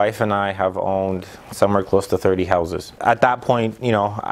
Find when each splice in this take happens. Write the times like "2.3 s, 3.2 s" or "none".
3.0 s